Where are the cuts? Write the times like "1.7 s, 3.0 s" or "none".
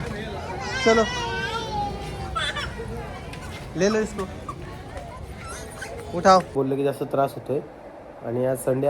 6.5 s